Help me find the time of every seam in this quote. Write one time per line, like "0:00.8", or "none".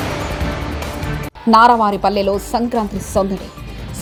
none